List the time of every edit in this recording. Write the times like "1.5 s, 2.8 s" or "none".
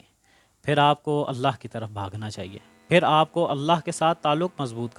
none